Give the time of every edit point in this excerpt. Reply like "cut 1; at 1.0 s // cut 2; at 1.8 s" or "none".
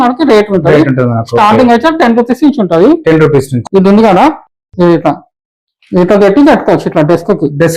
cut 1; at 3.5 s